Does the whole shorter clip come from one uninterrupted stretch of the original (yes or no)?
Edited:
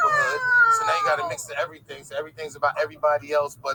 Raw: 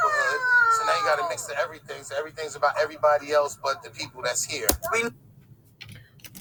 yes